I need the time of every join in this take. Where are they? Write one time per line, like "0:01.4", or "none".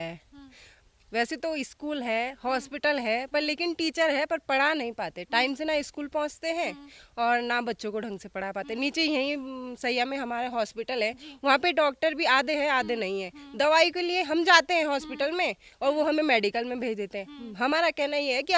none